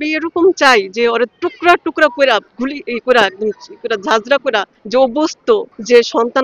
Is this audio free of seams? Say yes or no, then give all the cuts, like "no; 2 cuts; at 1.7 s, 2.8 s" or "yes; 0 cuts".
yes; 0 cuts